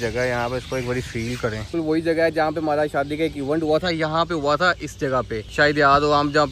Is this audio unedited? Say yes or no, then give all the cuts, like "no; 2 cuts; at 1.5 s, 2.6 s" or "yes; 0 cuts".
no; 1 cut; at 1.6 s